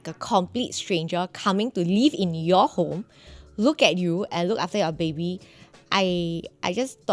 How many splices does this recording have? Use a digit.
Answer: 0